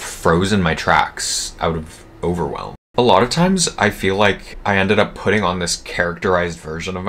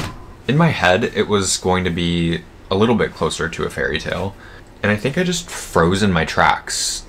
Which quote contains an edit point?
first; 1 cut; at 2.7 s

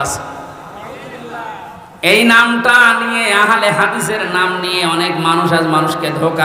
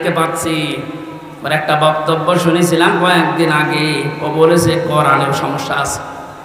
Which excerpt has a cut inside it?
first; 1 cut; at 1.8 s

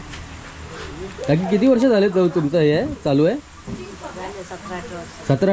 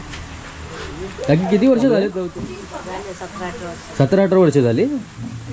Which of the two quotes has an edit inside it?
second; 1 cut; at 2.2 s

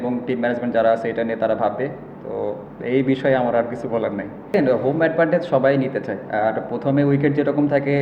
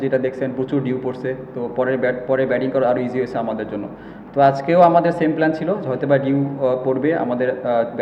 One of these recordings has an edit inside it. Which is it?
first; 1 cut; at 4.5 s

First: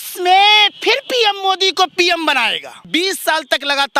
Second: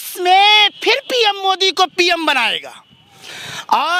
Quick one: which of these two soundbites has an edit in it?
first; 1 cut; at 2.9 s

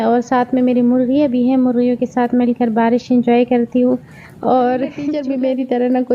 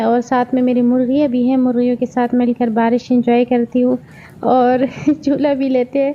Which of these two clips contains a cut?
first; 1 cut; at 5.1 s

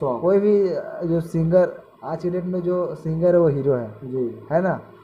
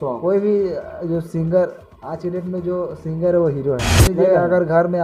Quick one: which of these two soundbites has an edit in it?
second; 1 cut; at 3.9 s

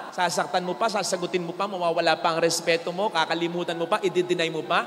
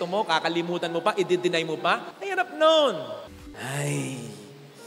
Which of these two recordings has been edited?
second; 1 cut; at 3.4 s

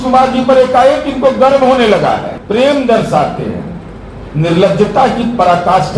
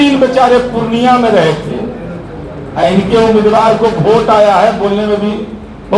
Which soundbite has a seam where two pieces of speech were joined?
first; 1 cut; at 2.3 s

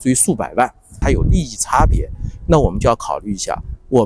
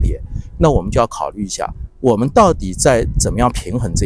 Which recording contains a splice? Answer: first; 1 cut; at 1.0 s

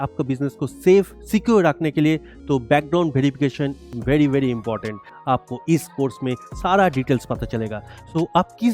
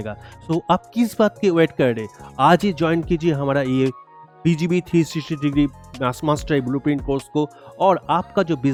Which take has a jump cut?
first; 1 cut; at 5.1 s

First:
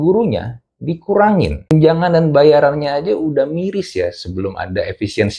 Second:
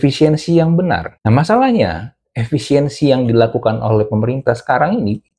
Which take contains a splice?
first; 1 cut; at 1.6 s

